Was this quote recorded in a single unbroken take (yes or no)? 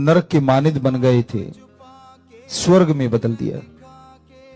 no